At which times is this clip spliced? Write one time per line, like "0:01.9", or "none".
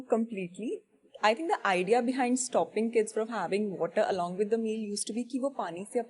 none